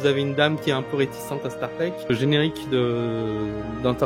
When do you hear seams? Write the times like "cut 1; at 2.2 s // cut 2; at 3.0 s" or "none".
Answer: cut 1; at 2.1 s

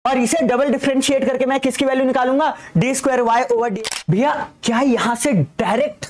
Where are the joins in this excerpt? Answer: cut 1; at 3.7 s

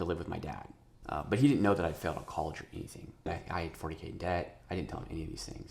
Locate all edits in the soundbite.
cut 1; at 0.9 s // cut 2; at 3.3 s

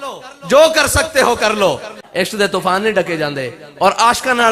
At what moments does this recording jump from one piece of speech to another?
cut 1; at 1.9 s

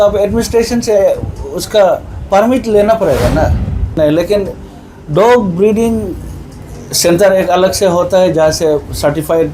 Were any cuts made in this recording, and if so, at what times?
cut 1; at 4.0 s

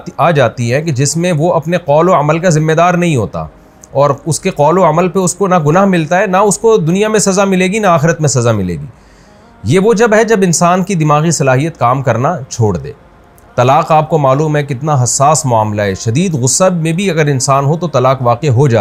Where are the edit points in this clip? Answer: none

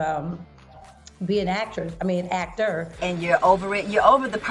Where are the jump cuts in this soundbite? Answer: cut 1; at 2.9 s

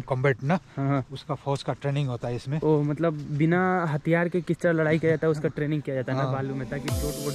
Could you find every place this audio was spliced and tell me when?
none

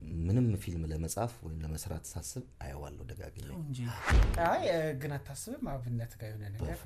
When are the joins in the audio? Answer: cut 1; at 4.1 s

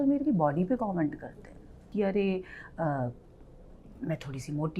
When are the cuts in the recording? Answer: cut 1; at 1.9 s

